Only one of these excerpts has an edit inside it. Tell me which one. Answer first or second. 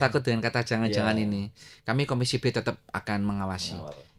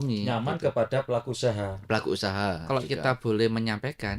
second